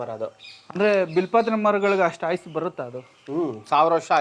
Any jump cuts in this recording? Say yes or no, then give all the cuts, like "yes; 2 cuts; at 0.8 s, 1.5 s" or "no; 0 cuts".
no; 0 cuts